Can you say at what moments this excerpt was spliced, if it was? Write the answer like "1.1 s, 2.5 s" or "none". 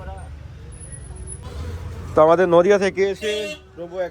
1.4 s